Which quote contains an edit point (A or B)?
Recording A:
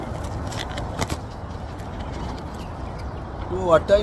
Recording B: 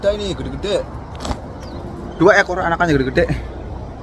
B